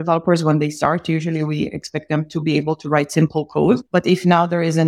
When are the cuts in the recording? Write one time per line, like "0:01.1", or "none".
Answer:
0:03.9